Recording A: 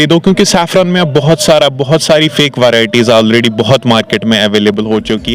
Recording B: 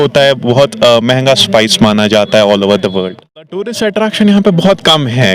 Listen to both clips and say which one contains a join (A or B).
B